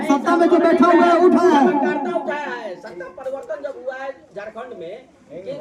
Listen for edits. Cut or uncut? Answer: uncut